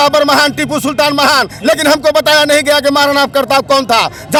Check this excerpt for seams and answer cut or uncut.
uncut